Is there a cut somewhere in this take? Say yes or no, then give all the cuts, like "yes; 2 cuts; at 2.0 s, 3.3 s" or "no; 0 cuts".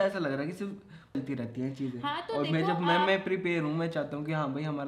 yes; 1 cut; at 1.1 s